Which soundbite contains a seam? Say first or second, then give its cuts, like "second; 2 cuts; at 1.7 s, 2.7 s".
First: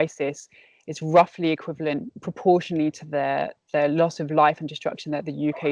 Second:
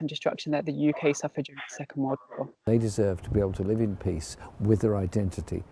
second; 1 cut; at 2.7 s